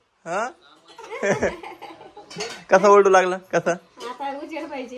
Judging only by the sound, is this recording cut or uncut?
uncut